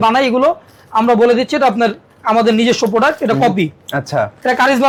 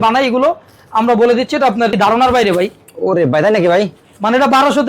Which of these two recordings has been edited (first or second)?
second